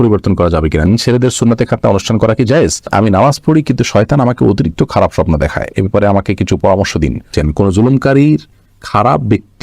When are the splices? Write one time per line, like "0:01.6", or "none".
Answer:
0:00.9
0:02.9
0:07.3